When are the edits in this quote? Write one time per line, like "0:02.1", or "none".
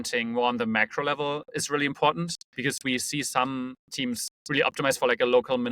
0:02.4